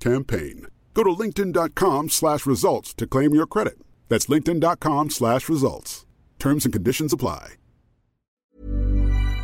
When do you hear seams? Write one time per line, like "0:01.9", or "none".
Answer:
0:08.4

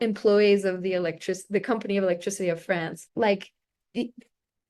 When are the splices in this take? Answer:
0:03.0

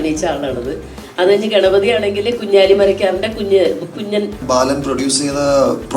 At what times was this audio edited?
0:04.4

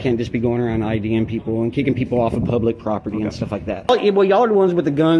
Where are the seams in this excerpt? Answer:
0:03.9

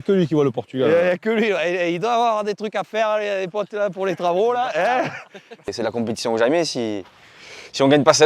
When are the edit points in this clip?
0:05.7

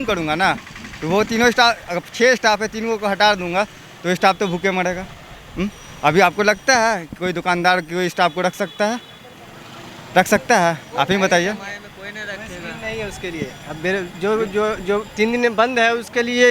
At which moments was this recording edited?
none

